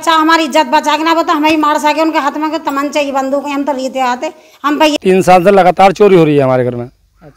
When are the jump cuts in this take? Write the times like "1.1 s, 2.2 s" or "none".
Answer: 4.9 s